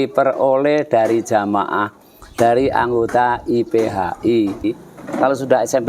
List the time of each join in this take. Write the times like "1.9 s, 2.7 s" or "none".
4.6 s